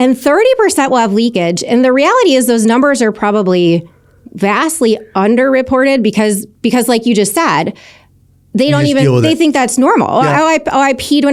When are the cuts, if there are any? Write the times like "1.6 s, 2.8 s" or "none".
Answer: none